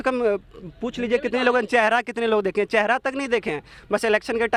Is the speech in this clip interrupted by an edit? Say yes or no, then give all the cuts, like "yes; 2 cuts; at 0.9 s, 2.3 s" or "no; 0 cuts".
no; 0 cuts